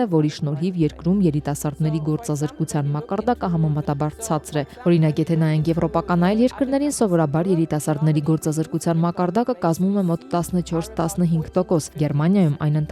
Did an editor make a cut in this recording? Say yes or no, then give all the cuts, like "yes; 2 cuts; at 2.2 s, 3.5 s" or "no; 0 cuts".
no; 0 cuts